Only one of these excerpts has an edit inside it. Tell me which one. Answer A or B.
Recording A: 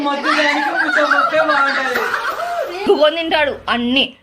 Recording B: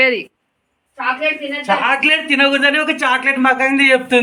A